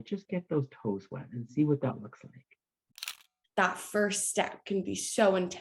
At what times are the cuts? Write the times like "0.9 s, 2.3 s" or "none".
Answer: 3.2 s